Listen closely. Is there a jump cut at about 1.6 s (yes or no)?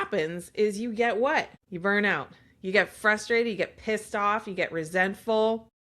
yes